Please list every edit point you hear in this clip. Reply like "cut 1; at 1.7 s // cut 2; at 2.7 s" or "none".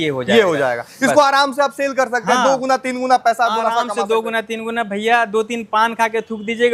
none